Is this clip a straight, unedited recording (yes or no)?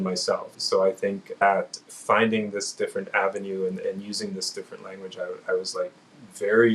no